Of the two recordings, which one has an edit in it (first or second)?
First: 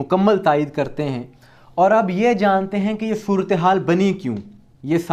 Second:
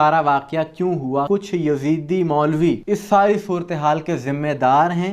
second